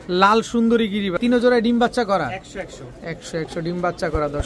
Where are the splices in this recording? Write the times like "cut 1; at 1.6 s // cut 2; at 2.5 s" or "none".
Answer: cut 1; at 1.1 s